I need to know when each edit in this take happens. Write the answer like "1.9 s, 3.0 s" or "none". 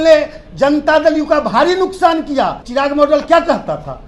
2.6 s